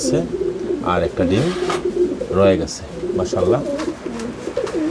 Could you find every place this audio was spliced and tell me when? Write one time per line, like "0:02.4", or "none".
none